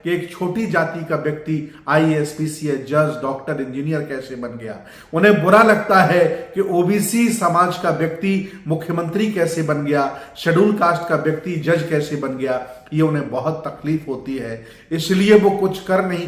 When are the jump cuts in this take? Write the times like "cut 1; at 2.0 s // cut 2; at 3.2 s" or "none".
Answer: none